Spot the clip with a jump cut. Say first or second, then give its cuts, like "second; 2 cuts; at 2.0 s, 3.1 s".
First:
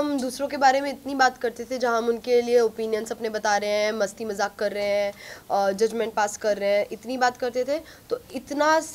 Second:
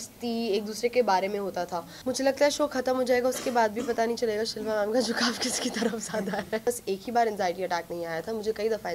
second; 2 cuts; at 1.9 s, 6.7 s